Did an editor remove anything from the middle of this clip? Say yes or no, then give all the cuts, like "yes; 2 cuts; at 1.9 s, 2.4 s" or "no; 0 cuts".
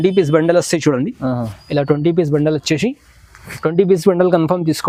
no; 0 cuts